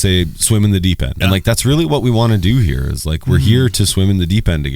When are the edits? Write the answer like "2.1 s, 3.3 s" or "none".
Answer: 1.1 s